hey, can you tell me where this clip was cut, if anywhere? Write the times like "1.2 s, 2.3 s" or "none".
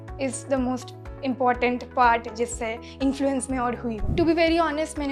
4.1 s